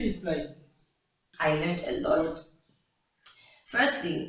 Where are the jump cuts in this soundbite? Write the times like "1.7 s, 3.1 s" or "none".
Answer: 1.2 s